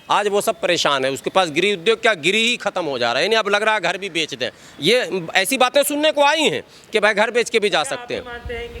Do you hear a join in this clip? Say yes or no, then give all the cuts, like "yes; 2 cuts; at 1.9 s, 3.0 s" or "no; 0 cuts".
no; 0 cuts